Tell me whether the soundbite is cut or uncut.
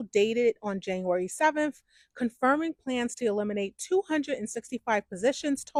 uncut